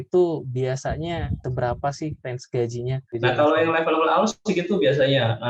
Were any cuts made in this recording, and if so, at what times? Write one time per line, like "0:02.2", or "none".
0:01.4
0:03.0